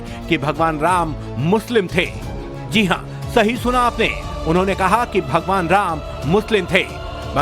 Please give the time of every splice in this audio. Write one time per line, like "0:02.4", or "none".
0:03.1